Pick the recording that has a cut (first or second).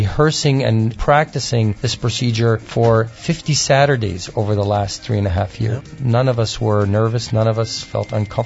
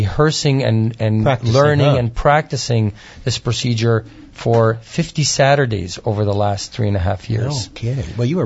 first